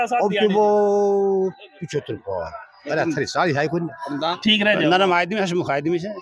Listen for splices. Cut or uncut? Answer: cut